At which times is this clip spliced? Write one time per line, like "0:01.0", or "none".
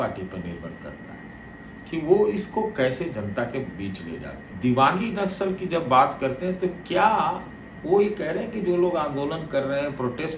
0:04.5